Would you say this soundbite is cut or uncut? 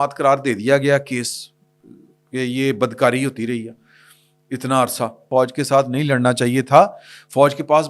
cut